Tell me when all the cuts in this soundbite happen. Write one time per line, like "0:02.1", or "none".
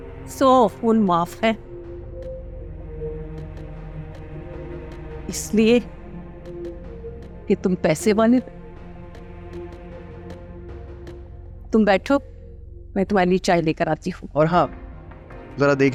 none